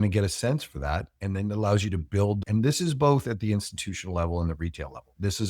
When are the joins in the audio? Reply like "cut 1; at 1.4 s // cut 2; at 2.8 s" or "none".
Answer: cut 1; at 2.4 s